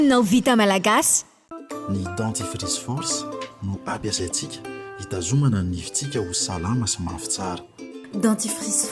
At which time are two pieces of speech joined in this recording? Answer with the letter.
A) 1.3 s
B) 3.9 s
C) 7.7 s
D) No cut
A